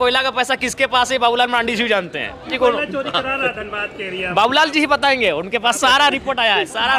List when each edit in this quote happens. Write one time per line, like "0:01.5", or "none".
none